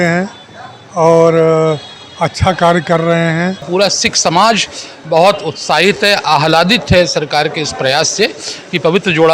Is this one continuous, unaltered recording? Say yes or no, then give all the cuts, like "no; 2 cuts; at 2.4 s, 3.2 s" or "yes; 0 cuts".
no; 1 cut; at 3.7 s